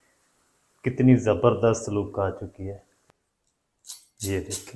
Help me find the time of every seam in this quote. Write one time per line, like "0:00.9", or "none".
0:02.9